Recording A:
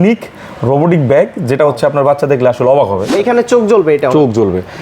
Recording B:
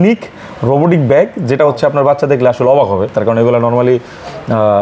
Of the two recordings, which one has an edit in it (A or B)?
A